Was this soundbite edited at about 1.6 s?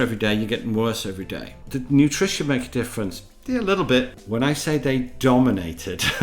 yes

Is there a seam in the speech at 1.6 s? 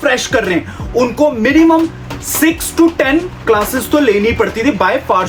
no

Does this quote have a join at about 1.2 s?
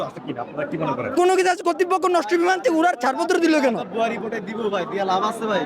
yes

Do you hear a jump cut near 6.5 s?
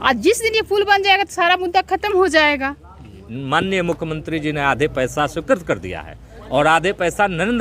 no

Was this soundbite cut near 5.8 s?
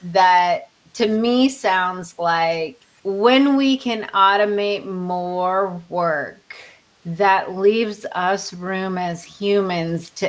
no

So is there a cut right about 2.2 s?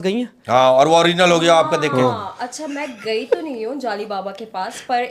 no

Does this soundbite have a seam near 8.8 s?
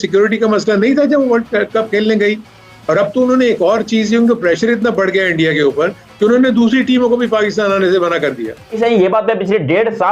yes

